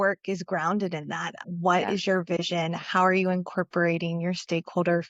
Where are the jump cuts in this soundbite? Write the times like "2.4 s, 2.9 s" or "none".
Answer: 1.4 s